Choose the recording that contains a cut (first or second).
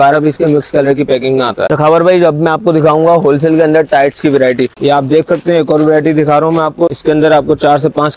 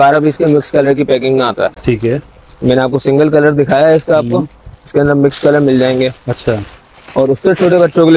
first